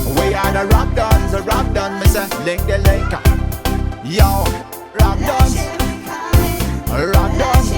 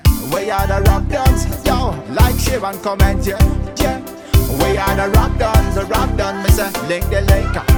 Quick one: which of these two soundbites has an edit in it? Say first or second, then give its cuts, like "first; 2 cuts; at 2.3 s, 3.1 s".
first; 1 cut; at 6.5 s